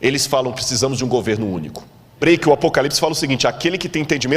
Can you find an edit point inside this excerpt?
yes; 1 cut; at 2.2 s

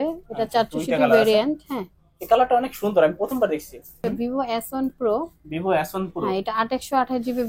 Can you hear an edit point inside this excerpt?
yes; 1 cut; at 3.9 s

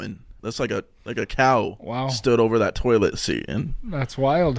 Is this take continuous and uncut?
yes; 0 cuts

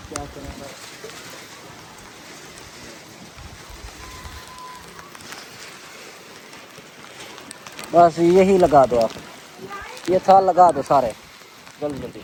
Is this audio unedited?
yes; 0 cuts

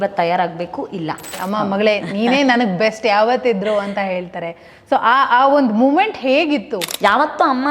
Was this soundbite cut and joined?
yes; 2 cuts; at 1.4 s, 6.8 s

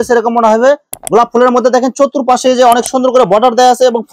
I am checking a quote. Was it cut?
no; 0 cuts

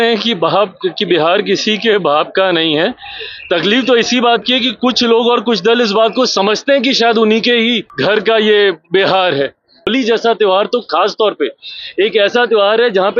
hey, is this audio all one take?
no; 2 cuts; at 7.9 s, 9.9 s

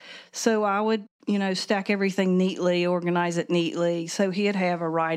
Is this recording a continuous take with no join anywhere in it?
yes; 0 cuts

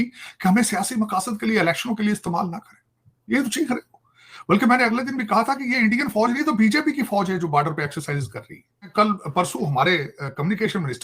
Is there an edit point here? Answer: yes; 1 cut; at 8.9 s

